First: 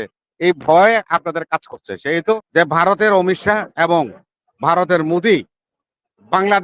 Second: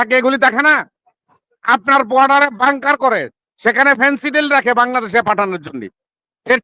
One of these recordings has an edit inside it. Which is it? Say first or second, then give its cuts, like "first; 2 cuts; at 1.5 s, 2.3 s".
first; 1 cut; at 2.4 s